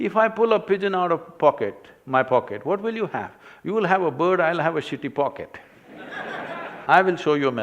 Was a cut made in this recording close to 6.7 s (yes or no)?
yes